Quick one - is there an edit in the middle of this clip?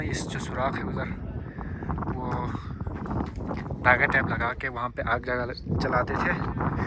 no; 0 cuts

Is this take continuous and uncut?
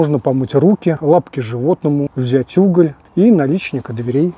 no; 3 cuts; at 1.0 s, 2.2 s, 3.0 s

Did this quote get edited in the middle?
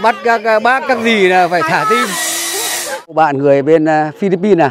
yes; 1 cut; at 3.1 s

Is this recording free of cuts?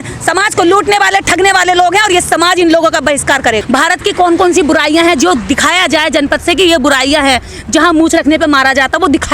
no; 1 cut; at 3.6 s

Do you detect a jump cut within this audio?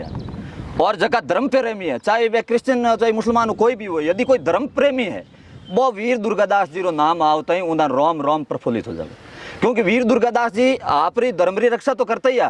no; 0 cuts

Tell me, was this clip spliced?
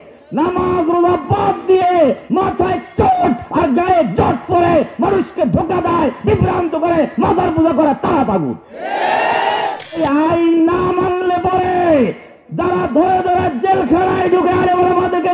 yes; 1 cut; at 10.0 s

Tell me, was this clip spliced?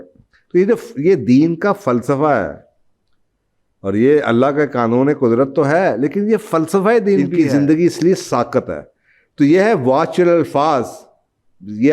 yes; 1 cut; at 7.3 s

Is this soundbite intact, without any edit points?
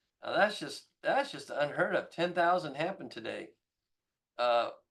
yes; 0 cuts

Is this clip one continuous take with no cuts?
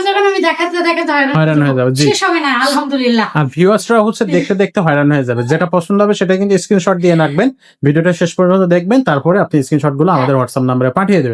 yes; 0 cuts

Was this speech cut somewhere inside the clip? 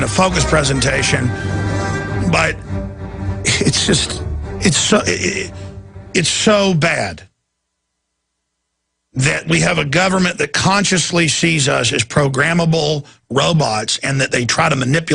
no; 0 cuts

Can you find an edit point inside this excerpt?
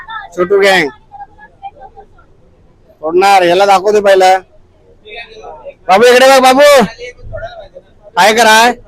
no; 0 cuts

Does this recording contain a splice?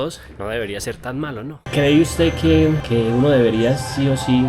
yes; 1 cut; at 1.6 s

